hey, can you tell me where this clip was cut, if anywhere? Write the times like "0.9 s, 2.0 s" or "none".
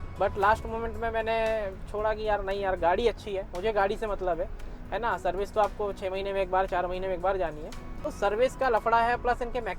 8.1 s